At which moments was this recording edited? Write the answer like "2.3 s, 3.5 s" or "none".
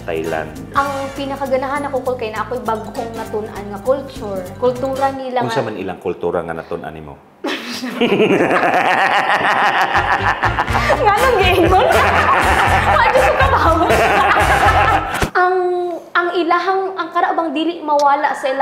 none